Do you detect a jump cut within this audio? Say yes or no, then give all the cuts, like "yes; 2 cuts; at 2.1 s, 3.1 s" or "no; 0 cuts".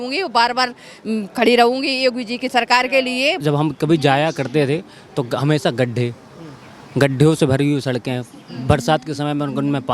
yes; 1 cut; at 3.4 s